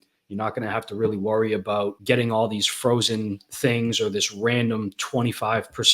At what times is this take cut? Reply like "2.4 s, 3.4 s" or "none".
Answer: 2.0 s